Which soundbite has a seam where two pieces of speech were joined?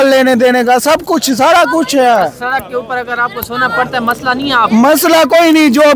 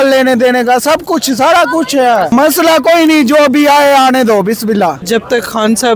second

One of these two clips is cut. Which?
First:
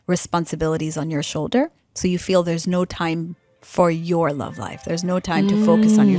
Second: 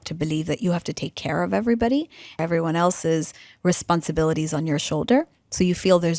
second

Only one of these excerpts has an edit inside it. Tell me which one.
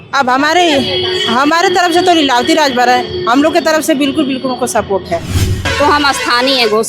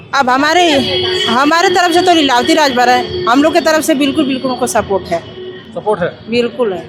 first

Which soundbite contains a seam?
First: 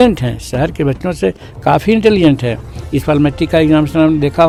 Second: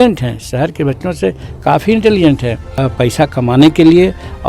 second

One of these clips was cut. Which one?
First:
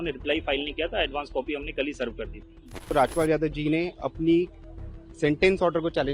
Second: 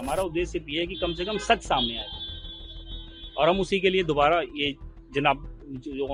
first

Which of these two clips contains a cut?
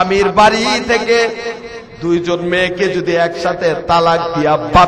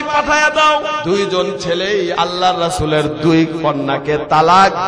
second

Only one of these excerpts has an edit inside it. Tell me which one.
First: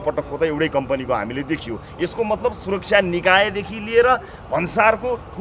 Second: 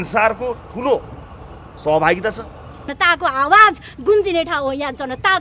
second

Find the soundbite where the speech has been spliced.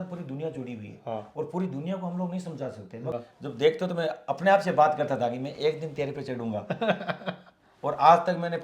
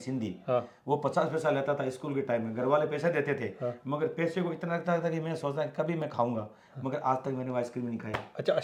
first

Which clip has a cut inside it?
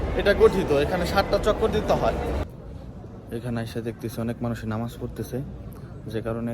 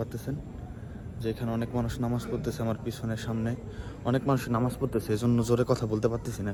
first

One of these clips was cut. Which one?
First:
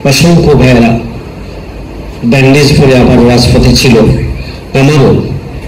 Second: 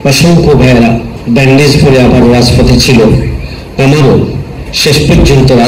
second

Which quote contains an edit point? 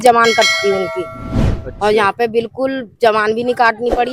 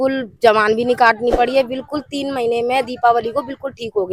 first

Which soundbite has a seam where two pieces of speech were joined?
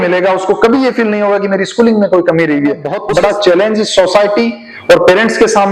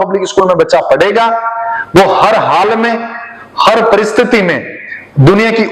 first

